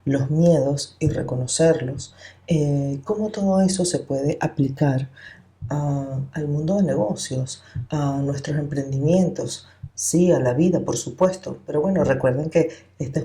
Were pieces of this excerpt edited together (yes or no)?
no